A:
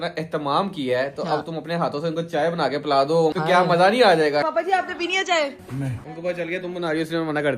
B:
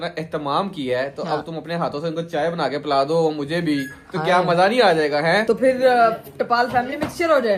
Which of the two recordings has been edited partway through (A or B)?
A